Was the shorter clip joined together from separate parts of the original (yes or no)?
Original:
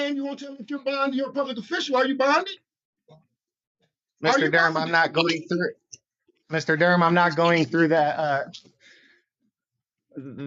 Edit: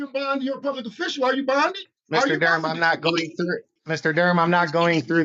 yes